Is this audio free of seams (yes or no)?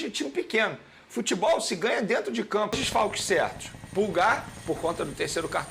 no